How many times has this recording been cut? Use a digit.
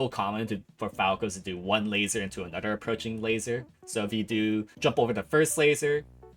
1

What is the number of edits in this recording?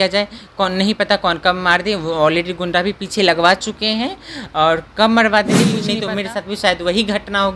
1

